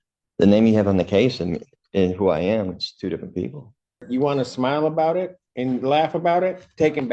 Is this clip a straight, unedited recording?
no; 1 cut; at 4.0 s

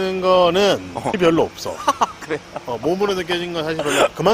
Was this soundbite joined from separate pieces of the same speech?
yes; 1 cut; at 1.2 s

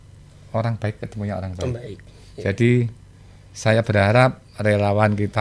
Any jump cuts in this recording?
no; 0 cuts

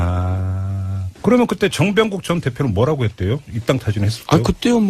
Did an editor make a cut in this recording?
yes; 1 cut; at 1.1 s

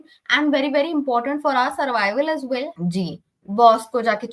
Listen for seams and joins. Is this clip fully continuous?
no; 1 cut; at 2.7 s

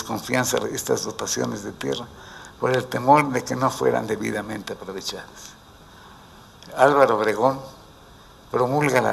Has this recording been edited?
yes; 1 cut; at 6.2 s

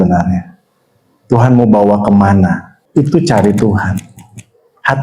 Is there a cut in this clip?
yes; 1 cut; at 2.7 s

